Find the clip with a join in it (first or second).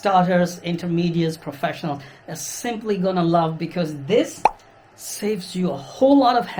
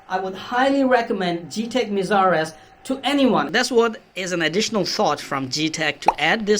second